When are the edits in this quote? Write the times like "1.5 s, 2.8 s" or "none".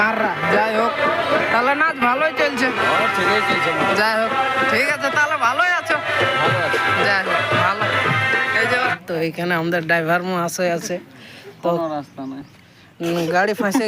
9.0 s